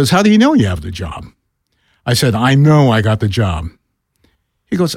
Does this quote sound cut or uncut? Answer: uncut